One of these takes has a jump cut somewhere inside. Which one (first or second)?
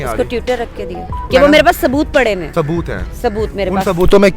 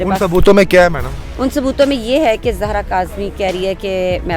first